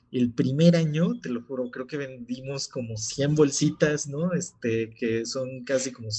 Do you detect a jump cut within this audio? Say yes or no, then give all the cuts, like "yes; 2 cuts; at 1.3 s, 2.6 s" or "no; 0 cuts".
no; 0 cuts